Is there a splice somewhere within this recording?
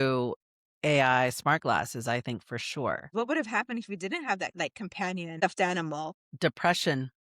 yes; 2 cuts; at 3.1 s, 4.8 s

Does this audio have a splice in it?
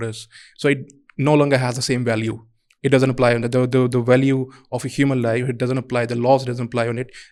no; 0 cuts

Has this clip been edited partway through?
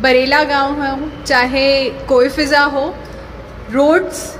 no; 0 cuts

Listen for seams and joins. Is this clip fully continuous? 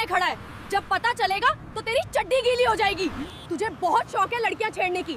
no; 1 cut; at 3.3 s

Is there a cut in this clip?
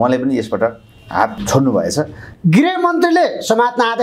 yes; 2 cuts; at 1.4 s, 2.2 s

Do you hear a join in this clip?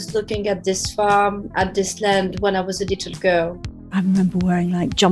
yes; 1 cut; at 3.9 s

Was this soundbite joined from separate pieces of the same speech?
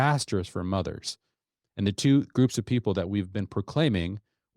no; 0 cuts

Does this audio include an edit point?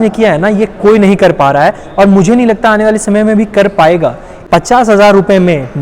yes; 1 cut; at 4.3 s

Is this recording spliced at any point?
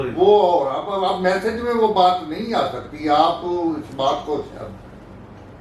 no; 0 cuts

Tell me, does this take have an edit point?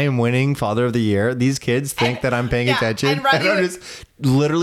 no; 0 cuts

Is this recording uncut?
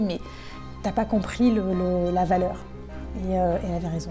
yes; 0 cuts

